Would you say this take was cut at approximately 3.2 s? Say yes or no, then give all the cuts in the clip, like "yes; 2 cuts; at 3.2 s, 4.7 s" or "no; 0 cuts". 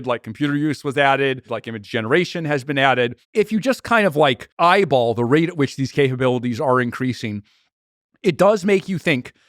yes; 3 cuts; at 1.6 s, 3.2 s, 4.5 s